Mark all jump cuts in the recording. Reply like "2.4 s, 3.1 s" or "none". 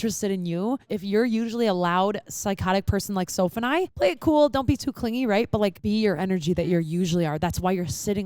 0.9 s, 3.9 s, 5.8 s